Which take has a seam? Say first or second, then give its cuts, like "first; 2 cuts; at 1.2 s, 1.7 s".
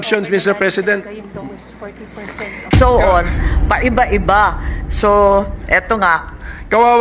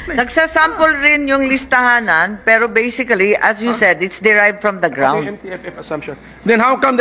first; 1 cut; at 2.7 s